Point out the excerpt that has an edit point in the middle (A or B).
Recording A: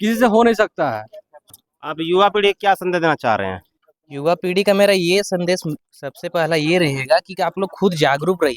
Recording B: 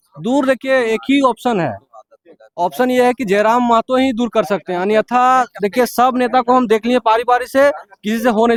A